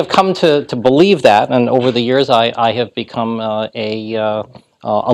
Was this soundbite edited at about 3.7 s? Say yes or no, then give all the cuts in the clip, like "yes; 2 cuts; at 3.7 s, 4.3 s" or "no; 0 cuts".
yes; 1 cut; at 3.7 s